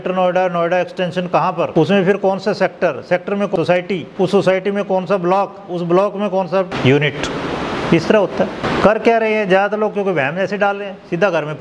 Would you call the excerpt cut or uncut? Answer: cut